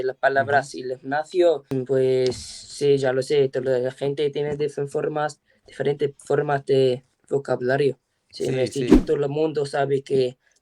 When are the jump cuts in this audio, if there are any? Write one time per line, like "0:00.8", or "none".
0:09.0